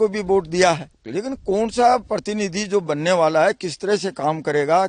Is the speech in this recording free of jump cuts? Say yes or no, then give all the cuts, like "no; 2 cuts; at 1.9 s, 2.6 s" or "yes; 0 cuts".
no; 1 cut; at 1.0 s